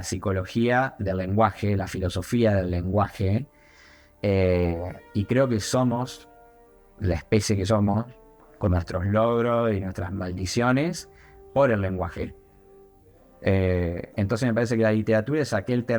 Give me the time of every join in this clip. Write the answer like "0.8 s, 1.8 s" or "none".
none